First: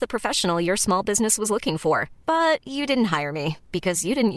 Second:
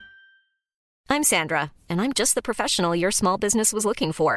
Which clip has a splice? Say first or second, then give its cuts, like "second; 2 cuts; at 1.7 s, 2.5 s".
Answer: second; 1 cut; at 0.9 s